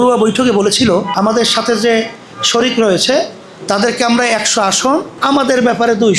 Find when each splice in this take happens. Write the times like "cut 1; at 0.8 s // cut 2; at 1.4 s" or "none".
cut 1; at 1.1 s // cut 2; at 5.1 s